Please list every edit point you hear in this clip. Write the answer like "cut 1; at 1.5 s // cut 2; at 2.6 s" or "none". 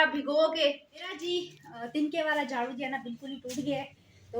cut 1; at 1.2 s